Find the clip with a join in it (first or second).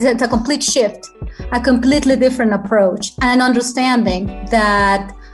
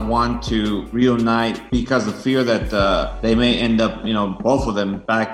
second